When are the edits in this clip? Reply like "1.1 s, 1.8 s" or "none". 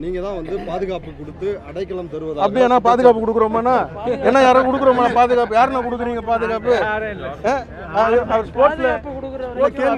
none